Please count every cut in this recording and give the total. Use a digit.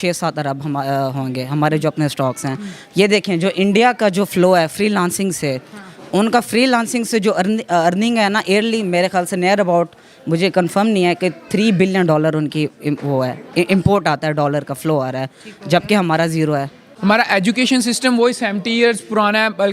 1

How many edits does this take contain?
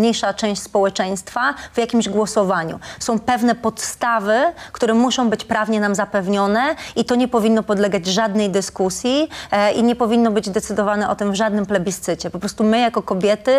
0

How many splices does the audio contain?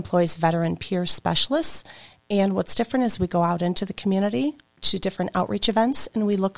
1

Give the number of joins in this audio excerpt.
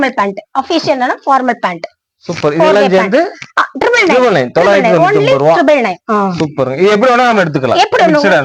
0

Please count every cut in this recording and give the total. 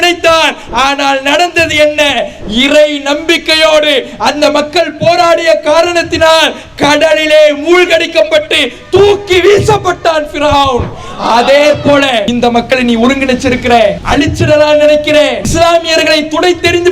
3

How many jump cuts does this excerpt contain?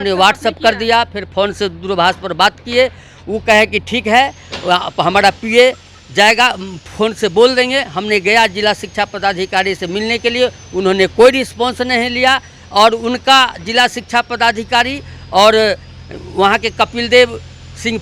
0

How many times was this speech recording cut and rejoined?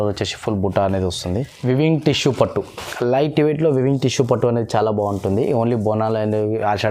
1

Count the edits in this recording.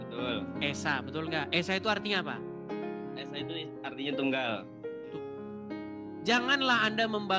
1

